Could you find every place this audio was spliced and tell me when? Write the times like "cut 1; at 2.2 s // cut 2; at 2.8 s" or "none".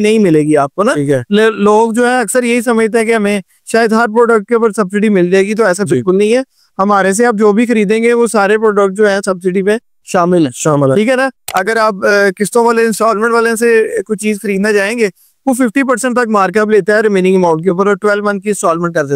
cut 1; at 11.5 s